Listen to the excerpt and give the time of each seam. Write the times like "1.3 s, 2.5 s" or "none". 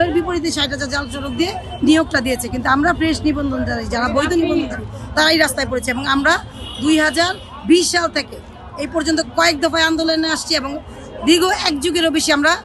none